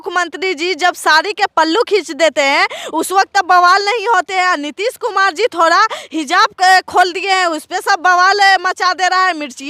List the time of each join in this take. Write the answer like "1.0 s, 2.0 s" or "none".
none